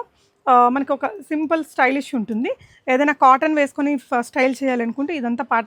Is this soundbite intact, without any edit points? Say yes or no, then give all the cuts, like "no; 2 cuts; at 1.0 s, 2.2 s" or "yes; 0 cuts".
yes; 0 cuts